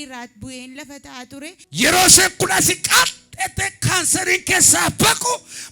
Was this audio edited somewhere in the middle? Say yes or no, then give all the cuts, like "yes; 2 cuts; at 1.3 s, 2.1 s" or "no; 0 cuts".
yes; 1 cut; at 1.6 s